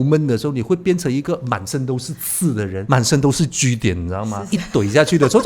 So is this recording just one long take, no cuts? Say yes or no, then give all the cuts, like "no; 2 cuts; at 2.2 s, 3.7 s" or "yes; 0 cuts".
no; 2 cuts; at 2.8 s, 4.4 s